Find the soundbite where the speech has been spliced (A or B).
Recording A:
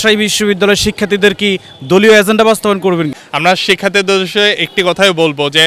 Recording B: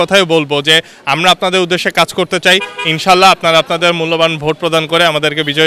A